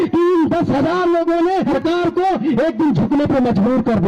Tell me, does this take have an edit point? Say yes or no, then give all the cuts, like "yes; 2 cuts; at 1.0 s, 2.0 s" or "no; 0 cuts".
yes; 1 cut; at 1.8 s